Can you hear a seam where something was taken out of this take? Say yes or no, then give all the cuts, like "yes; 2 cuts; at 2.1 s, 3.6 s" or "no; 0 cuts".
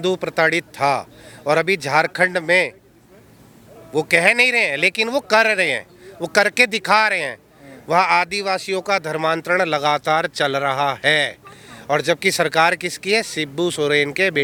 no; 0 cuts